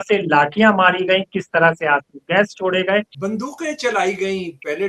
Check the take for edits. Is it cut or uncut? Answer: cut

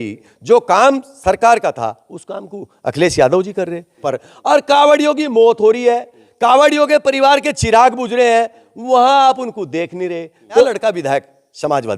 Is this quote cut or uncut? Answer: cut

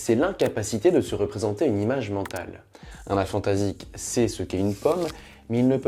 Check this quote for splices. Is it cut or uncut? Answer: uncut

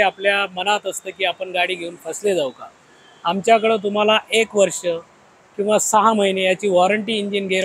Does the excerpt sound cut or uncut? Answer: uncut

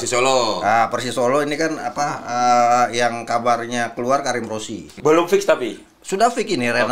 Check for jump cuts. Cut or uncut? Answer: cut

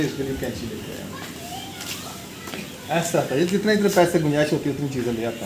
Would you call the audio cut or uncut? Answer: uncut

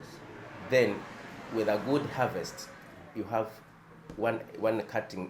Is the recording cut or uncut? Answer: uncut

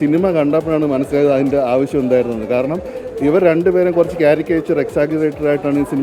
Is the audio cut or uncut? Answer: uncut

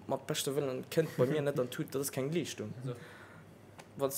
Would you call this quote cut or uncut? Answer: cut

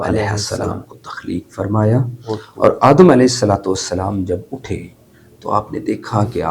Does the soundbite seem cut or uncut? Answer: uncut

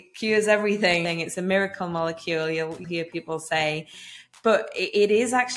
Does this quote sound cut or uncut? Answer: cut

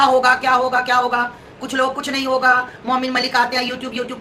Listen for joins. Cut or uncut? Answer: uncut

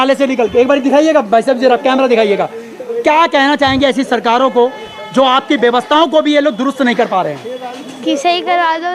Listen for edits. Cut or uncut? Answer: uncut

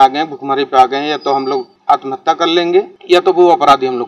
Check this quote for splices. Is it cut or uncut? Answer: cut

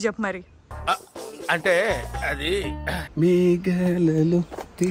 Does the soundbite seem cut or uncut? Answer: cut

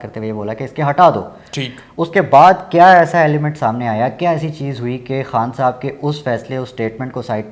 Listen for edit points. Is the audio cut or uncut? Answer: uncut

